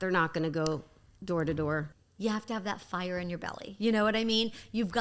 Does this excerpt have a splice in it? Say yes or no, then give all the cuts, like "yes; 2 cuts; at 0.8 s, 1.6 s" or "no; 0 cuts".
yes; 1 cut; at 2.0 s